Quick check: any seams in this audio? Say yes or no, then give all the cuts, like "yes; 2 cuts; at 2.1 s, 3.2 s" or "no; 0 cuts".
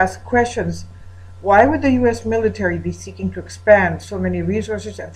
yes; 1 cut; at 1.0 s